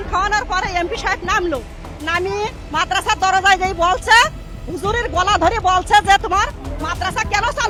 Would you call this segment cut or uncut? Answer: uncut